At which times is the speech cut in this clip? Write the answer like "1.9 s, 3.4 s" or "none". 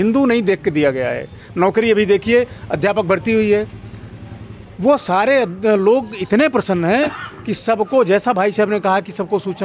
none